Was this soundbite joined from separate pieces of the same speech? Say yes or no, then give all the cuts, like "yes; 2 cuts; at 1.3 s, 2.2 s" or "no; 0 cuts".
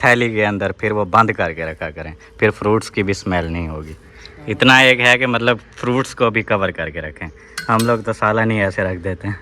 no; 0 cuts